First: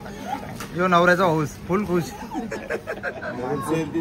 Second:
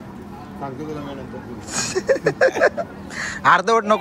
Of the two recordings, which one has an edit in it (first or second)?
first